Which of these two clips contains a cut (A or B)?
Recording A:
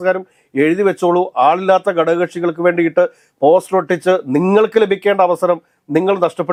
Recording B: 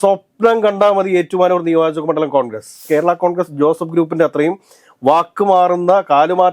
B